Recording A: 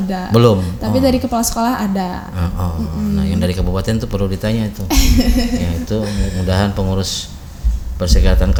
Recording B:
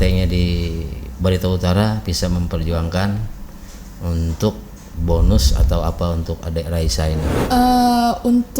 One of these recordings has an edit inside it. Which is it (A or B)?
B